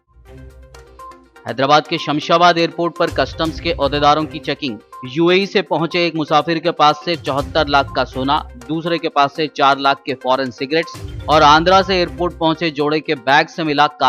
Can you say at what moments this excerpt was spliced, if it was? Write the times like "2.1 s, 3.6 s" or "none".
none